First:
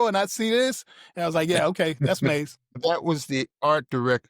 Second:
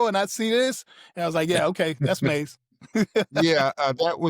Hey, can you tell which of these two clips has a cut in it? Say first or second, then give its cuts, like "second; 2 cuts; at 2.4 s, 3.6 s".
first; 1 cut; at 2.8 s